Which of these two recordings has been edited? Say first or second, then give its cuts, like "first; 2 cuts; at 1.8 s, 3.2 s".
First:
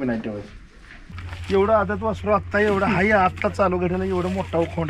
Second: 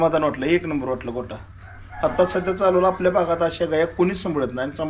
first; 1 cut; at 1.2 s